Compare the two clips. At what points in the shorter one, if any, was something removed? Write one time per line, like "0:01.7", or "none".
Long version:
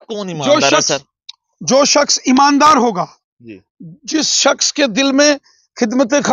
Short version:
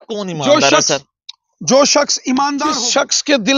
0:02.6